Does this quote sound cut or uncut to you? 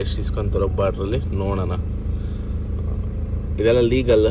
uncut